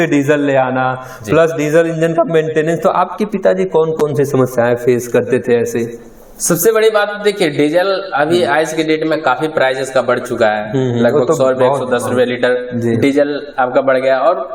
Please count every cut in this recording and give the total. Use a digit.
0